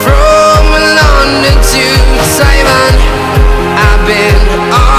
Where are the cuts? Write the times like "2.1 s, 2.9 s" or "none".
none

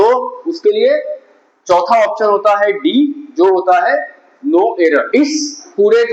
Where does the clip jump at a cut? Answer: 5.1 s

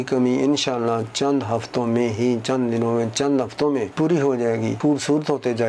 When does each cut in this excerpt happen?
3.9 s, 4.8 s

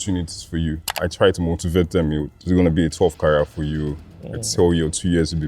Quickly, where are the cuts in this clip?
0.9 s

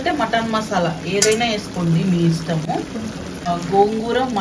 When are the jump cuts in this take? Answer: none

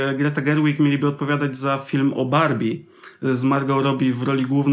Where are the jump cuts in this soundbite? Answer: none

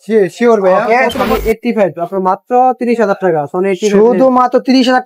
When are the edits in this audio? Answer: 1.2 s

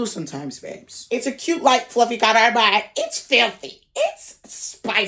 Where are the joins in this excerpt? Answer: 0.9 s

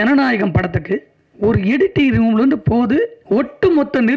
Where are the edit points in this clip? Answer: 1.2 s, 3.2 s

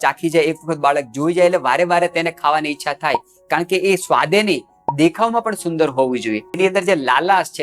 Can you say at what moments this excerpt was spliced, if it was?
6.5 s

